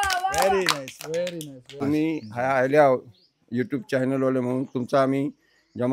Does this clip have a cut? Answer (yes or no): yes